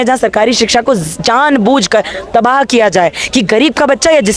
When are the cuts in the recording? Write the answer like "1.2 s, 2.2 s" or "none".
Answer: none